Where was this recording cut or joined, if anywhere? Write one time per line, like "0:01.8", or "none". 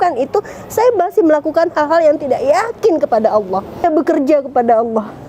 0:03.8

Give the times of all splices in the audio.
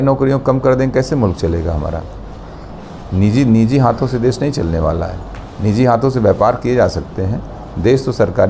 none

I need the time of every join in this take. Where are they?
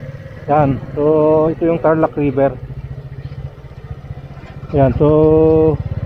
none

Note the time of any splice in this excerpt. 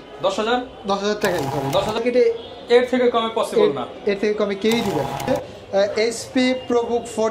0:02.0
0:05.3

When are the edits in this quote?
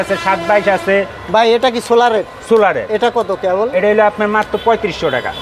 none

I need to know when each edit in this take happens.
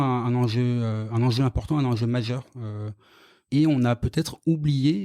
0:03.4

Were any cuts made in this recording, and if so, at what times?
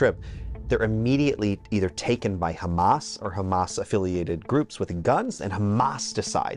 0:05.3

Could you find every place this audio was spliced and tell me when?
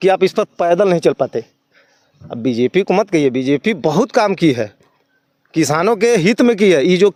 none

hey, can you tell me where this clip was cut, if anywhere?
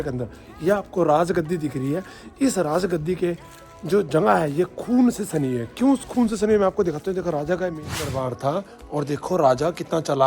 0:07.9

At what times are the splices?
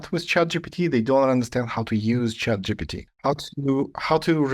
0:03.2

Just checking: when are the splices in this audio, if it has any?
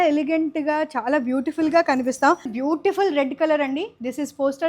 0:02.5

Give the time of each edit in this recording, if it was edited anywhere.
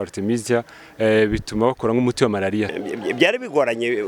0:02.8

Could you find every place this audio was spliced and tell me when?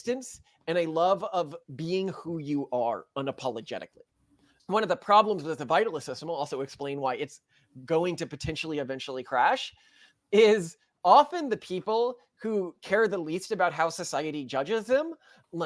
0:04.5

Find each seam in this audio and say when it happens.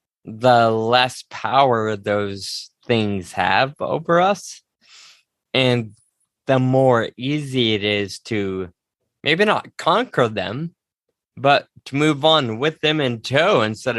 0:11.8

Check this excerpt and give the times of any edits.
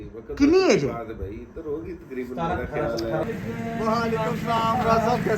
0:03.2

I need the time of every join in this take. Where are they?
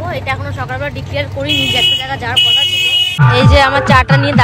0:03.0

